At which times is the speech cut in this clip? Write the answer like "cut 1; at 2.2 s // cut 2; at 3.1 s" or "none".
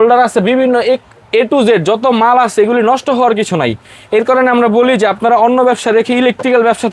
none